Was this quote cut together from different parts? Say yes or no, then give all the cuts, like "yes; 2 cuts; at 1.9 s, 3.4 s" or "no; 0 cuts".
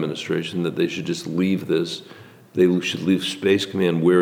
no; 0 cuts